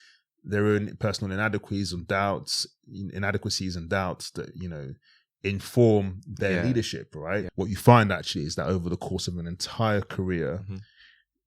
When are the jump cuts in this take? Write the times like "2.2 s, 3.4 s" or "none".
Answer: 7.5 s

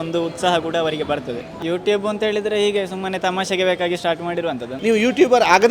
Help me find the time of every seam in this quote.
1.5 s, 4.7 s

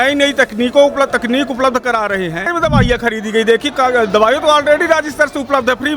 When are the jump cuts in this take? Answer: 2.5 s

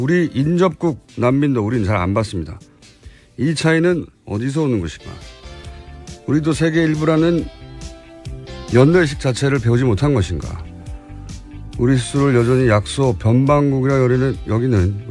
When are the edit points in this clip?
none

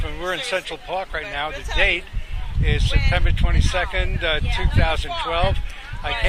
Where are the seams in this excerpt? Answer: none

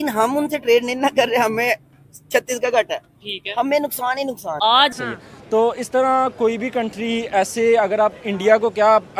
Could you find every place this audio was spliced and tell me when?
5.0 s

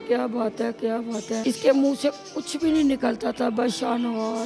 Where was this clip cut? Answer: 1.4 s

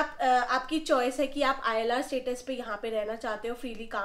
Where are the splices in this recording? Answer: none

